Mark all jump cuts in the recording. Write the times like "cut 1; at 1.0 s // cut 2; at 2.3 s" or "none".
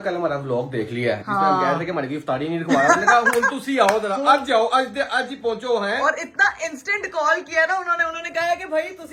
none